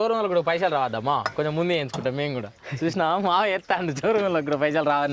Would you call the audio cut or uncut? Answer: uncut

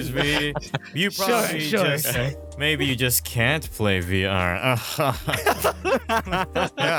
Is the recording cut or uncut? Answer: uncut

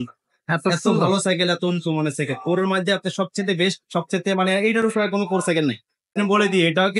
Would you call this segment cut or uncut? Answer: cut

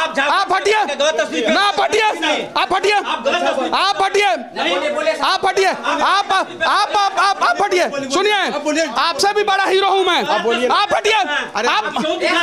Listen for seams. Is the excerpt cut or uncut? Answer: uncut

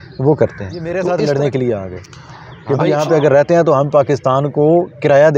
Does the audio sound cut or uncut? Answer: cut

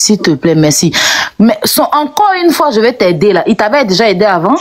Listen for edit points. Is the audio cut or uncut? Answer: uncut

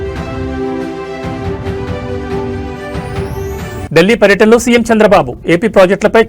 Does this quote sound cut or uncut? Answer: cut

